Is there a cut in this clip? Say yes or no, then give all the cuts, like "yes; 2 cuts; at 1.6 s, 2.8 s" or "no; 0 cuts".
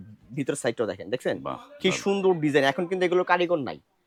no; 0 cuts